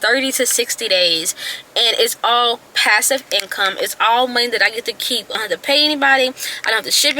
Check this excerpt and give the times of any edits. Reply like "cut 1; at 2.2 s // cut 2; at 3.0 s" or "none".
cut 1; at 5.4 s